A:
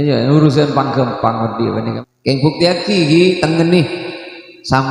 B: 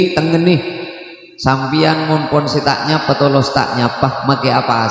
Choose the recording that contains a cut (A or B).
A